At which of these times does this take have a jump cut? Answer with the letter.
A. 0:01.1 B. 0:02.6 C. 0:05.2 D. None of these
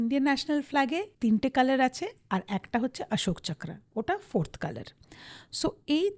A